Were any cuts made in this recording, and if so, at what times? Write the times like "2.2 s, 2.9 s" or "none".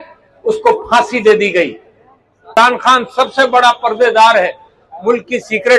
2.5 s